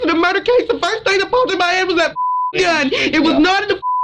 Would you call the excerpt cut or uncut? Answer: uncut